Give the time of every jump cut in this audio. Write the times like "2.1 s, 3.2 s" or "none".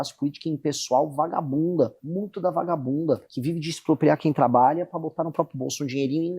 2.0 s, 3.3 s